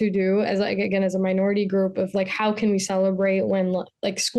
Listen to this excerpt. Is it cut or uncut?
uncut